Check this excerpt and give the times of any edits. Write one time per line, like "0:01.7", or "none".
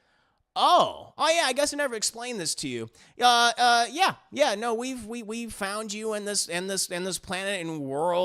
none